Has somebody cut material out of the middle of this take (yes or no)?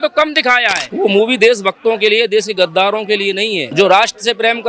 yes